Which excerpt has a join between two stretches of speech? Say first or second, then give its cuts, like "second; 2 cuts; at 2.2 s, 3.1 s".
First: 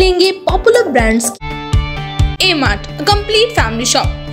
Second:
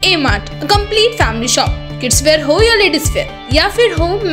first; 1 cut; at 1.3 s